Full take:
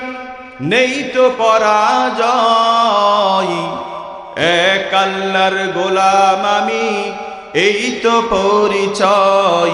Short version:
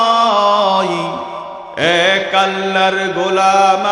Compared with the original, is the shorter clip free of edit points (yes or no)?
yes